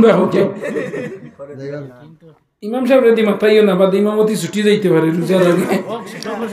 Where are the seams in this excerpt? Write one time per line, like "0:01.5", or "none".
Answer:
0:01.9